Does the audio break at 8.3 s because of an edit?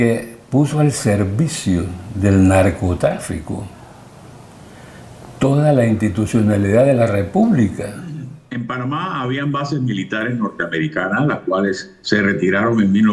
yes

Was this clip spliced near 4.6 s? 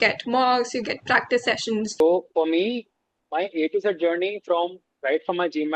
no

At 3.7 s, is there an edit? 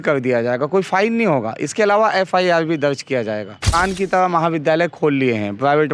yes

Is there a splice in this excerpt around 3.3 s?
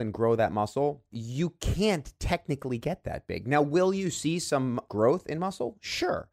no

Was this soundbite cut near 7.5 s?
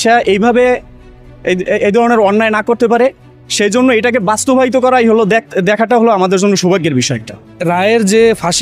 yes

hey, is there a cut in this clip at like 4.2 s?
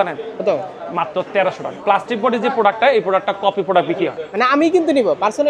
yes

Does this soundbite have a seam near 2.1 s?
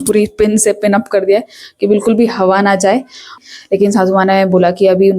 no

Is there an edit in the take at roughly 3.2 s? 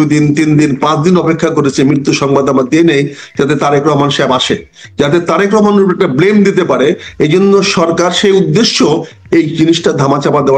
no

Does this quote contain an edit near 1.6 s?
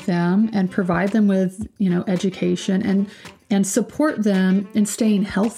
no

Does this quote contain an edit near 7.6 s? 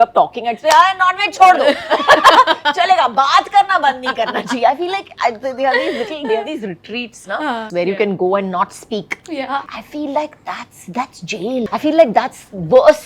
yes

